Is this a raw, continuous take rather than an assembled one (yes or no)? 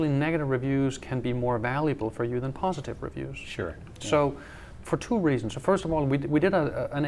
yes